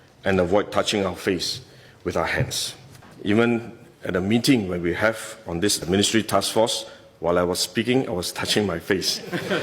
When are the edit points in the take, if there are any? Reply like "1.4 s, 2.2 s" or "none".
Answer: 3.1 s

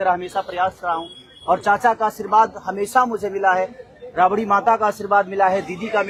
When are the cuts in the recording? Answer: none

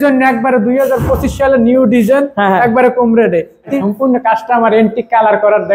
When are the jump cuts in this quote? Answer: 3.8 s

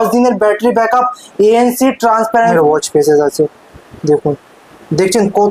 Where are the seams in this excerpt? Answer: 2.4 s

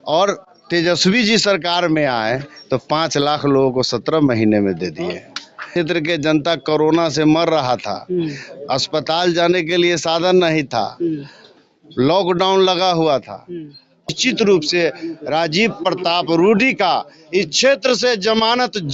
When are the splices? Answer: 5.7 s, 14.1 s

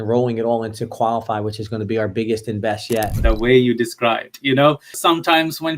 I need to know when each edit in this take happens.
3.2 s

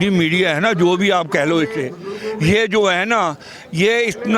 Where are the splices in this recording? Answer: none

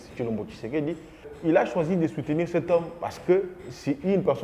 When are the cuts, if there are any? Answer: 1.3 s

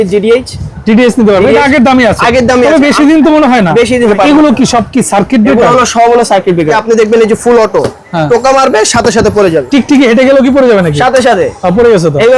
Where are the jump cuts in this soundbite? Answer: 4.1 s, 6.8 s, 9.6 s

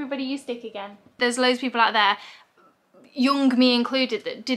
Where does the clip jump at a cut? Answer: 1.2 s

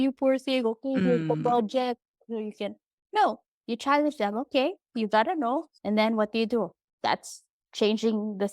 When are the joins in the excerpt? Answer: 3.5 s, 6.8 s

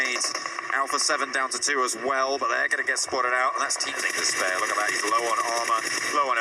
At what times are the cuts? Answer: 4.0 s

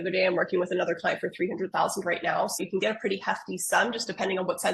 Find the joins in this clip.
2.6 s

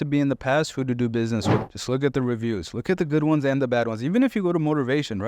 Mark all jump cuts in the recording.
1.6 s

